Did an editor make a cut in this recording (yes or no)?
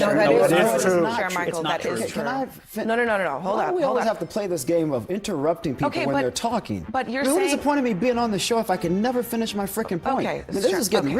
no